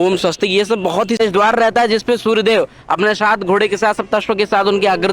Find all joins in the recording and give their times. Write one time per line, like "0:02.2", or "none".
0:01.2